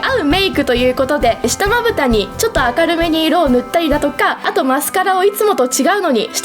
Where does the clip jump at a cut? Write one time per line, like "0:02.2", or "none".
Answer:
0:01.4
0:02.3
0:04.4